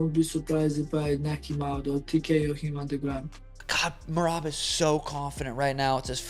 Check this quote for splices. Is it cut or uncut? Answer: cut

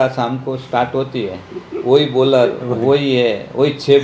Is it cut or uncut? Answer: uncut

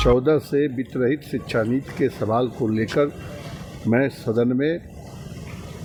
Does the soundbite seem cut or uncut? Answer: uncut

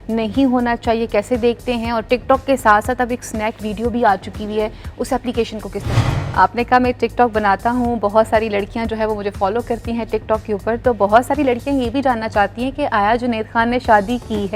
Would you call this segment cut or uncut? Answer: cut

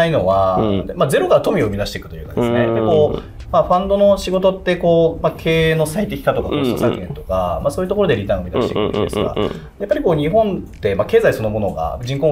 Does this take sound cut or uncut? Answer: uncut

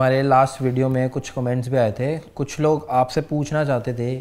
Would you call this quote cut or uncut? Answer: uncut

